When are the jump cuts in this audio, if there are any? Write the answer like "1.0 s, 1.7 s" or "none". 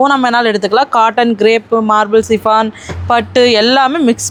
none